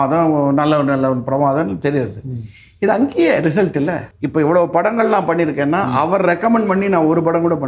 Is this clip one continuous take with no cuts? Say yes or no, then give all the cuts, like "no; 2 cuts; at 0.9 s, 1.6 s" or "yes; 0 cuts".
no; 1 cut; at 4.1 s